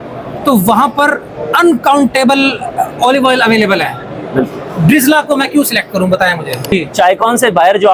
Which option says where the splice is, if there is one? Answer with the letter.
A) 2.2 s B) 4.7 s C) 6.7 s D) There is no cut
C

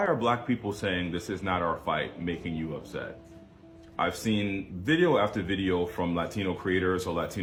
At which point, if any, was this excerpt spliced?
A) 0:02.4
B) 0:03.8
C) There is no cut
C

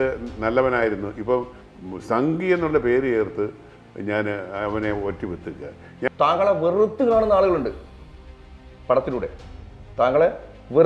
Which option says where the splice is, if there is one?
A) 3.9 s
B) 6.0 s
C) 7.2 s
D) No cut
B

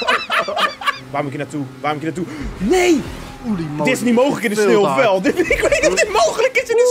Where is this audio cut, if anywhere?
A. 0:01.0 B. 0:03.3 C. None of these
A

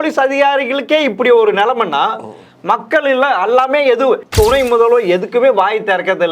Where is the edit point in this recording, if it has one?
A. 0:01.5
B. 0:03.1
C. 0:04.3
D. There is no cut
C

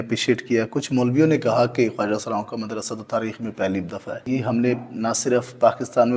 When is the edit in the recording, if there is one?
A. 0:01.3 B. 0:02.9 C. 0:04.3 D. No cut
C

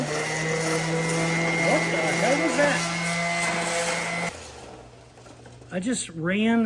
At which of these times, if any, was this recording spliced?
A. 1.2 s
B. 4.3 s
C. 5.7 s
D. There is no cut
B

